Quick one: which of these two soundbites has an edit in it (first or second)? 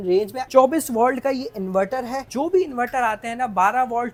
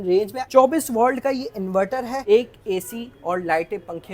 second